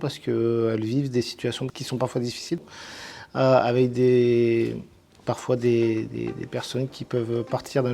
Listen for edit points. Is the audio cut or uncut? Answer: cut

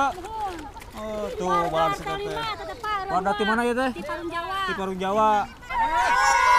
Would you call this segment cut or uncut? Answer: cut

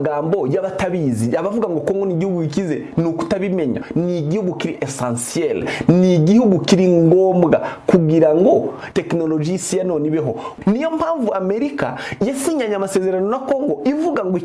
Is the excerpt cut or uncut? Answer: cut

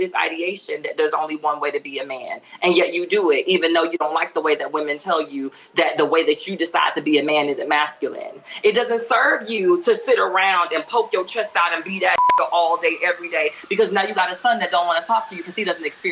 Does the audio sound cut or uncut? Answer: uncut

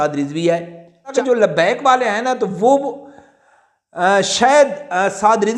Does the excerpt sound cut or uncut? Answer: cut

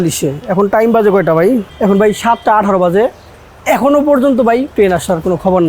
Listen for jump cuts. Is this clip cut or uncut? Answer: cut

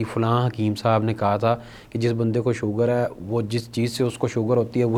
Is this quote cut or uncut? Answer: uncut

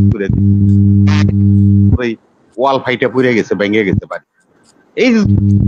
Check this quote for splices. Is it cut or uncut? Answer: uncut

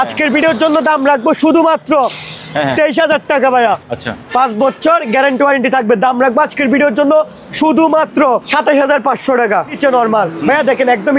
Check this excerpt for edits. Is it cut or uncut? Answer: cut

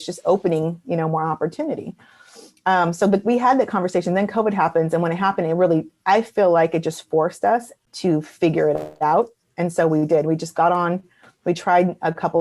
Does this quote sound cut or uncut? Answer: cut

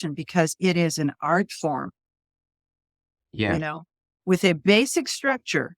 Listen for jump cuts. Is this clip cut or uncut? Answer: uncut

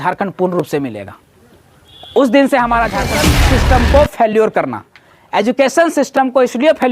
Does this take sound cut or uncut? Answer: cut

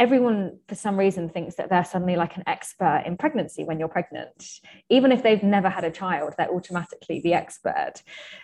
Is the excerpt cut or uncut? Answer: uncut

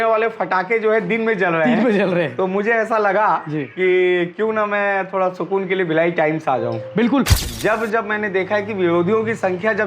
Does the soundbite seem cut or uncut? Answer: cut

